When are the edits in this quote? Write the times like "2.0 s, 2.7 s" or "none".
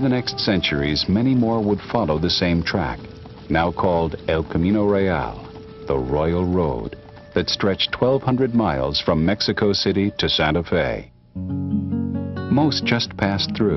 8.0 s